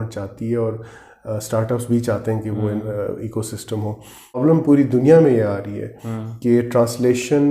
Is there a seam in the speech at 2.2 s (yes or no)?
no